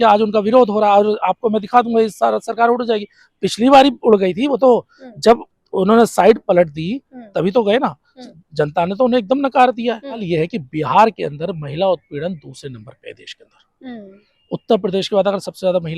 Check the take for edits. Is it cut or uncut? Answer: cut